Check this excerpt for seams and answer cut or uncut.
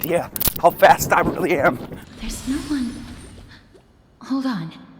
uncut